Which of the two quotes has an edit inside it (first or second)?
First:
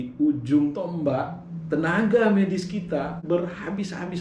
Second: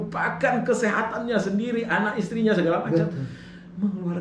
first